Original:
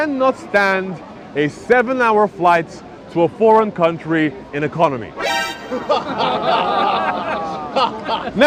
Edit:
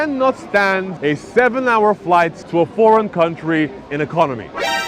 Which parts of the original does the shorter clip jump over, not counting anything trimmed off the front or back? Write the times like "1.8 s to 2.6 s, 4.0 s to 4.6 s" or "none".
0.9 s to 1.2 s, 2.7 s to 3.0 s